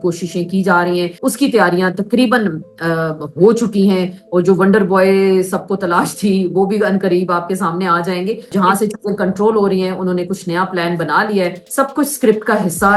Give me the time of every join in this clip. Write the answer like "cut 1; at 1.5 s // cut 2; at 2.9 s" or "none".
cut 1; at 1.1 s // cut 2; at 8.5 s // cut 3; at 11.6 s